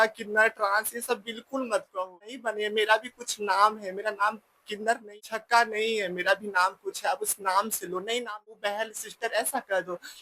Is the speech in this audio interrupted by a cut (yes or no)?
yes